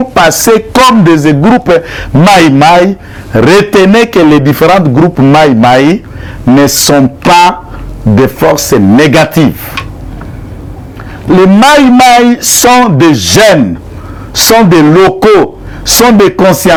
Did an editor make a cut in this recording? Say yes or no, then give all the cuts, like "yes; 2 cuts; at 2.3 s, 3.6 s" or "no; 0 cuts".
no; 0 cuts